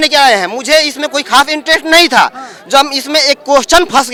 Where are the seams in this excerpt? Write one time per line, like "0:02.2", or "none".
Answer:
none